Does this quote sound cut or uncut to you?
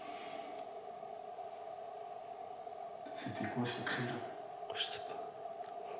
uncut